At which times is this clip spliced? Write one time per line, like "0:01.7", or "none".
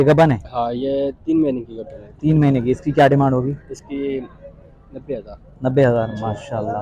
none